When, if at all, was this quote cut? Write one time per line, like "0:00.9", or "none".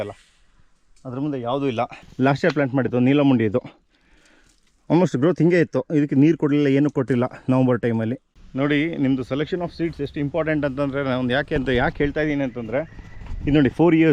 0:02.0
0:08.3